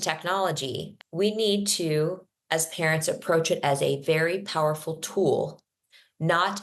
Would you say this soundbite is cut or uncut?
cut